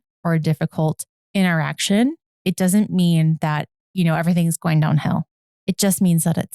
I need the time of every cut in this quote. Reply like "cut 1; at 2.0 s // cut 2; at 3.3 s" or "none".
cut 1; at 5.4 s